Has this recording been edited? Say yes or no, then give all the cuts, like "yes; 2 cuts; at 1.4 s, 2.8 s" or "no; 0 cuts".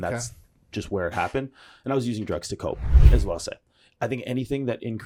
yes; 1 cut; at 2.9 s